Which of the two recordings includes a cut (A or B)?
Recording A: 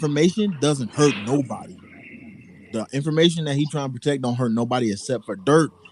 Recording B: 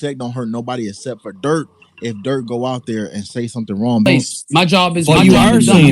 B